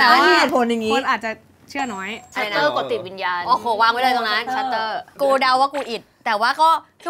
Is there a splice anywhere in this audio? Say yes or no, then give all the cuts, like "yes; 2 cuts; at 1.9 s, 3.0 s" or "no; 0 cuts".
yes; 2 cuts; at 2.3 s, 5.1 s